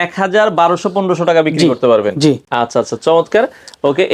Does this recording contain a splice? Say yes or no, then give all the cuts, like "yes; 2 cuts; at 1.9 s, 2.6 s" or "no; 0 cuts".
no; 0 cuts